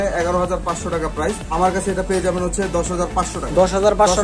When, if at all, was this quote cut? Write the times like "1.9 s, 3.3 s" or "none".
1.4 s